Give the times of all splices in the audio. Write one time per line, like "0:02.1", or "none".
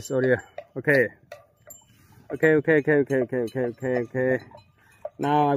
none

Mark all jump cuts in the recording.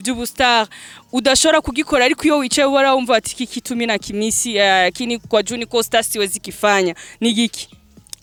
none

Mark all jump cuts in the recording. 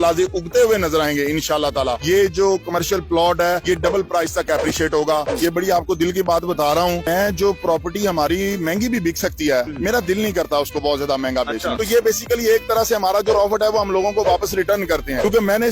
0:01.9
0:05.3
0:07.0
0:11.8

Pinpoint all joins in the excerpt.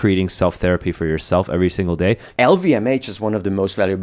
0:02.3

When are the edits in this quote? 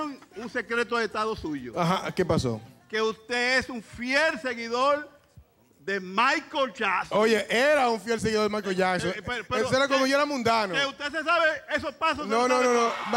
none

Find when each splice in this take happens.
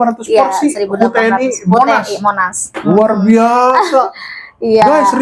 none

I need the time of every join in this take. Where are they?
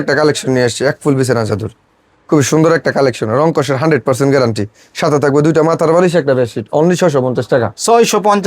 none

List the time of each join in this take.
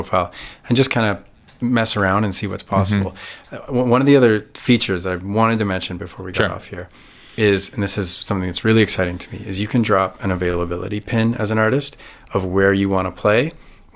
none

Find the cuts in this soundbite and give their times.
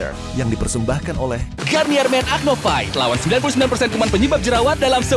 0:03.9

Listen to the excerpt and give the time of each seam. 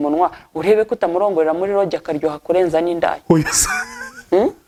none

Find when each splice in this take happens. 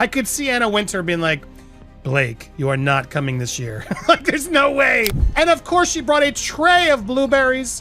0:05.2

